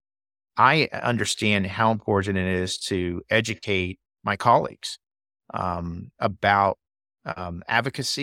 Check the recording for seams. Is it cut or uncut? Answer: cut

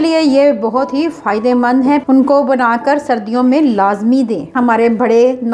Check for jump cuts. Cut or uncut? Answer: cut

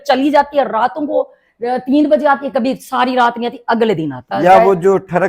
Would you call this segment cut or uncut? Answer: cut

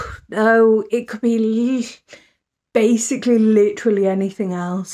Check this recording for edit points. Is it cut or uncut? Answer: uncut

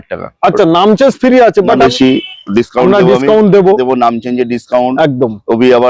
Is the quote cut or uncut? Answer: cut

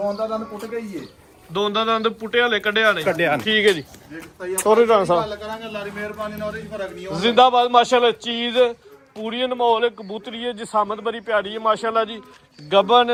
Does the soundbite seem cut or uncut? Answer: uncut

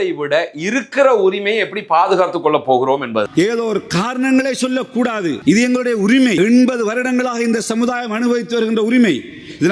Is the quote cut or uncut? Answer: cut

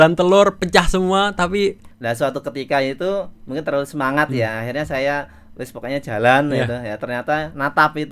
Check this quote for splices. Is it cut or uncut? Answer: cut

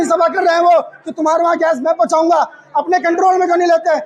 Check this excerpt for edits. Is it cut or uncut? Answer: uncut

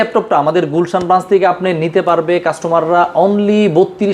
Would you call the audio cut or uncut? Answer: uncut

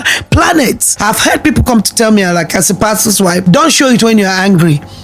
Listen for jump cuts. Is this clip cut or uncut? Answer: cut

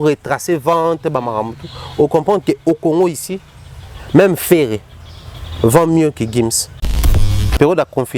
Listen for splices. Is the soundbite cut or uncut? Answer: cut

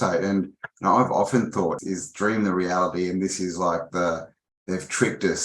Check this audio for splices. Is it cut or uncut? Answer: cut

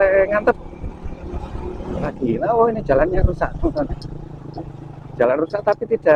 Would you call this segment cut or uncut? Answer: cut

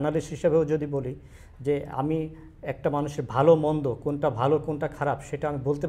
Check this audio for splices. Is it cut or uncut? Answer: uncut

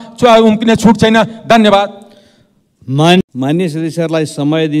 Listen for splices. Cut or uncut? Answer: uncut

